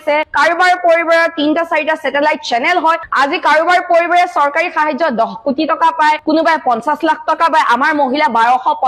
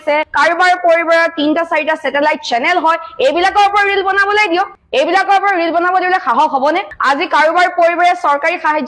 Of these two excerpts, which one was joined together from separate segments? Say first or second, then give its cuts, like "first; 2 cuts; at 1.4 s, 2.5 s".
first; 1 cut; at 3.1 s